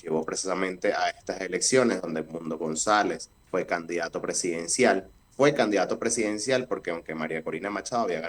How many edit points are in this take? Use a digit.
2